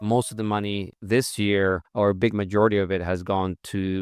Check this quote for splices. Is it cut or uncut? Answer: cut